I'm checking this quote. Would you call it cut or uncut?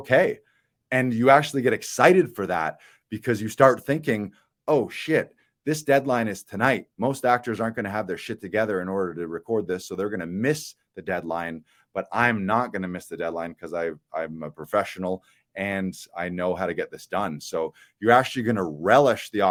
uncut